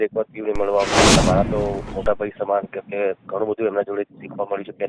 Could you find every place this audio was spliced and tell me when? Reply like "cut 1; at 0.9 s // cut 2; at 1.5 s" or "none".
cut 1; at 1.2 s

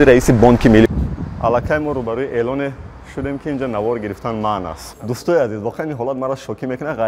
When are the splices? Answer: cut 1; at 0.9 s // cut 2; at 4.9 s

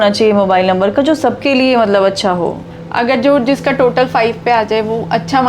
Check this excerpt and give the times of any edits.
cut 1; at 2.7 s

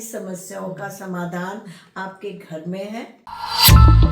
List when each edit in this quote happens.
cut 1; at 3.2 s

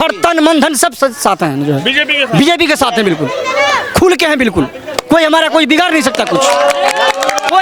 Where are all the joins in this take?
none

